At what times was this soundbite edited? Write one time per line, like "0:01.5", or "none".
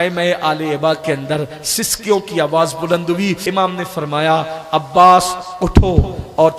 0:03.4